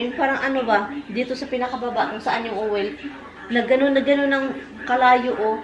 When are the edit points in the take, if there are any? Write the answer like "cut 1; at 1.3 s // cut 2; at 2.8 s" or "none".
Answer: none